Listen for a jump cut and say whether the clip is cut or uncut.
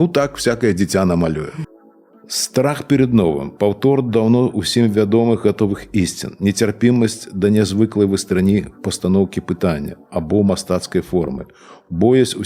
cut